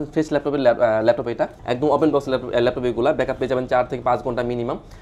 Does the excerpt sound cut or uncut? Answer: cut